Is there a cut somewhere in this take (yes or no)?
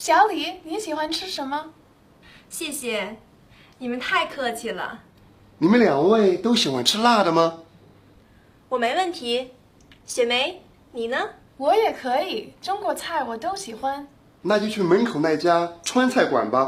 no